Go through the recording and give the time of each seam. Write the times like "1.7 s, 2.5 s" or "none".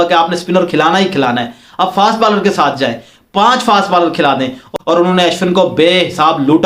4.7 s